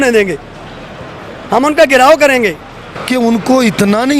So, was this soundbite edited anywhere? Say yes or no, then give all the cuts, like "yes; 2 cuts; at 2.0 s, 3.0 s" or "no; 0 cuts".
yes; 1 cut; at 2.9 s